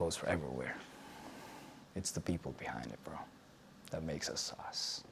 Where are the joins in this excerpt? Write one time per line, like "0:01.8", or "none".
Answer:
none